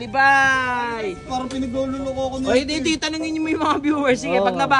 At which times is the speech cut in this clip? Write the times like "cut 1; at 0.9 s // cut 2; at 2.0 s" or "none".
cut 1; at 1.2 s